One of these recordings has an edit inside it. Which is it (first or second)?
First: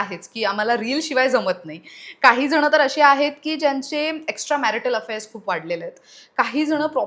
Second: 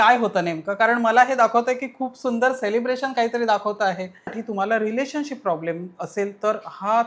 second